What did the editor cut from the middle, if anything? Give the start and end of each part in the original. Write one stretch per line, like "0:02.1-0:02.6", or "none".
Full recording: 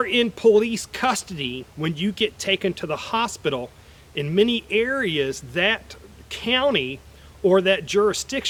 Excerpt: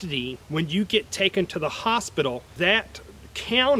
0:03.8-0:05.4